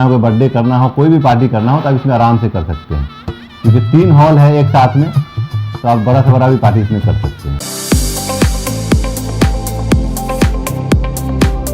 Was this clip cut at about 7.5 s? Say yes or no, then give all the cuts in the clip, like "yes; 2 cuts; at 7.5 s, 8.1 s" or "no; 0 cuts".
yes; 1 cut; at 7.5 s